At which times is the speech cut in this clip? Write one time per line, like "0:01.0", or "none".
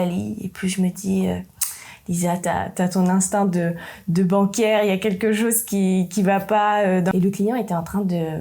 0:07.1